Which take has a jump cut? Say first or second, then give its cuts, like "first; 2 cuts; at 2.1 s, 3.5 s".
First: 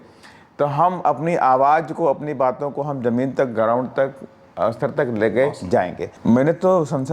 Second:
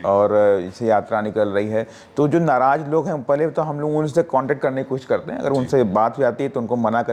first; 1 cut; at 6.1 s